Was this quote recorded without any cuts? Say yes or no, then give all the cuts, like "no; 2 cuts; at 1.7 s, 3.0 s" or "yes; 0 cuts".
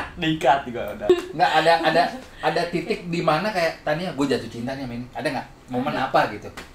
no; 1 cut; at 1.1 s